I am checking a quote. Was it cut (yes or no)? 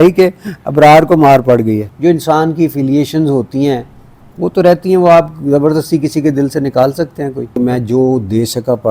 yes